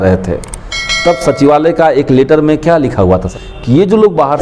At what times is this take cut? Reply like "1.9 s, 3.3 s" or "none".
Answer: 3.3 s